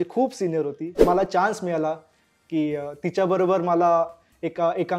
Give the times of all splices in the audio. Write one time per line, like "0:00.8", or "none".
0:01.0